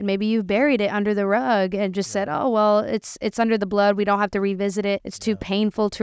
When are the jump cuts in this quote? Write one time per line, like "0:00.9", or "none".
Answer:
0:05.1

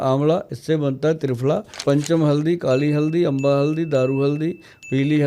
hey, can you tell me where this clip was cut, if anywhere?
0:01.8

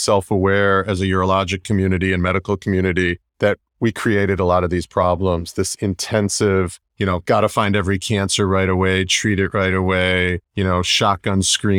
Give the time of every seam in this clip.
0:03.2
0:06.8
0:10.4

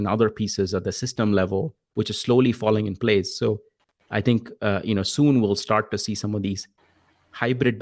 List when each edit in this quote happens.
none

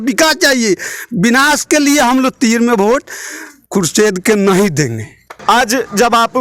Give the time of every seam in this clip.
none

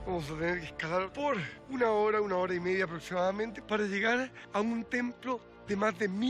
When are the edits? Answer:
0:01.6
0:03.6
0:04.4

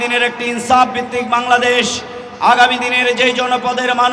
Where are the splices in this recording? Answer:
none

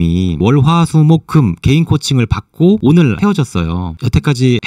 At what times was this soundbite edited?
none

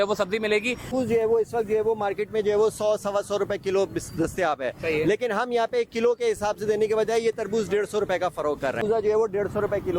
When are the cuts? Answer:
0:00.9
0:08.8

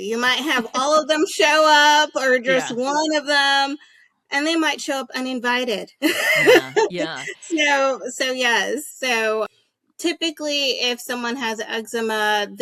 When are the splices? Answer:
none

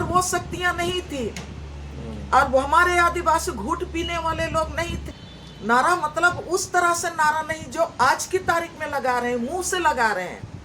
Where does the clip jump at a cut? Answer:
0:05.0

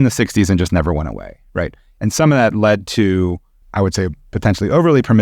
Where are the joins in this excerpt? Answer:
0:03.6

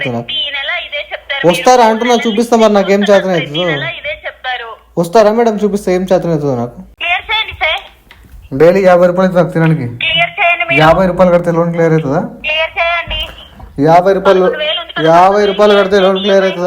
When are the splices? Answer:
0:06.9

